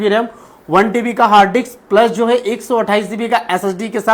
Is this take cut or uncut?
uncut